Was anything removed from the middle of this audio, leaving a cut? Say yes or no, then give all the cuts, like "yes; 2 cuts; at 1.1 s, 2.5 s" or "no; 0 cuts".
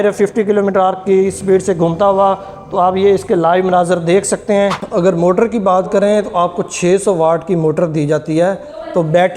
yes; 1 cut; at 4.8 s